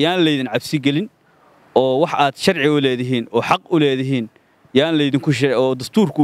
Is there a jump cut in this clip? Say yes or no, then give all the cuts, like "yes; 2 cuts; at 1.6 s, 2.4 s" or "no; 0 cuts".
no; 0 cuts